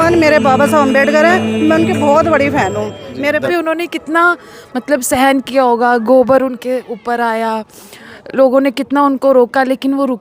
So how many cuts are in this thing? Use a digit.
1